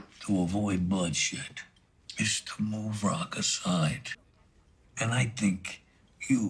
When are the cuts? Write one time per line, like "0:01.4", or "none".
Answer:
none